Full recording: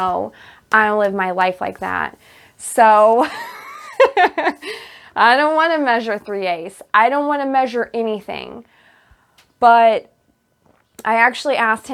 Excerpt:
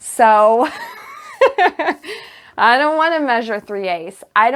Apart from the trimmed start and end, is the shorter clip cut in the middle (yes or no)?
no